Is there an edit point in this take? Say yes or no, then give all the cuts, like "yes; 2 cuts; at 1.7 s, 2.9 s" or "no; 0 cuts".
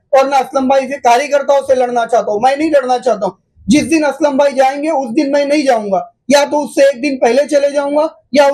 no; 0 cuts